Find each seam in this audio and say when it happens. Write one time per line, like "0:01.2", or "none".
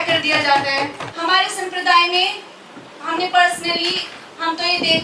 0:01.0

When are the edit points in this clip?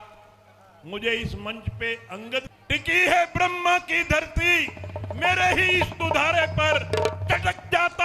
0:02.5

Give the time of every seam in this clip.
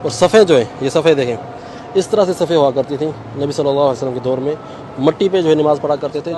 none

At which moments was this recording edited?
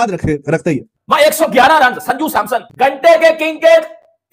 0:00.9
0:02.7

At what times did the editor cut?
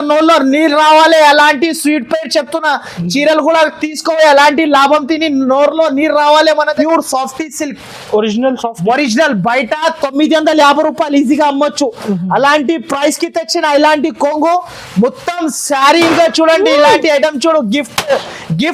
0:06.8
0:16.1

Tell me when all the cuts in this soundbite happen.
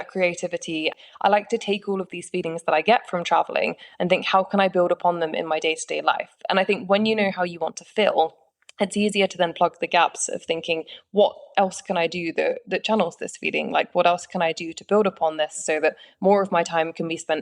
0:00.9

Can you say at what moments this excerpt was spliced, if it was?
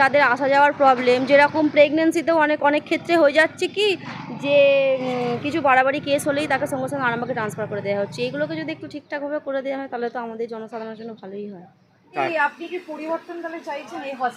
0:12.2

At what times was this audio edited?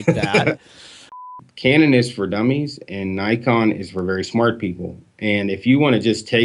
0:01.2

